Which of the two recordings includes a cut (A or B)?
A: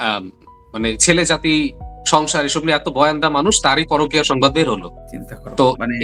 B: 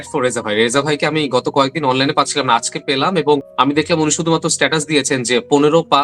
B